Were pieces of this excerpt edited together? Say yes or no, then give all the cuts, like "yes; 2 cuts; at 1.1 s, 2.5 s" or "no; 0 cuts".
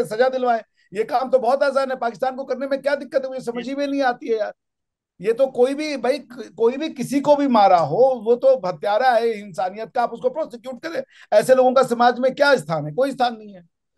no; 0 cuts